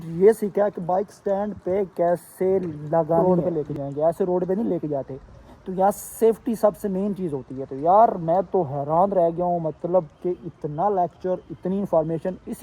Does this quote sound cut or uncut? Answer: cut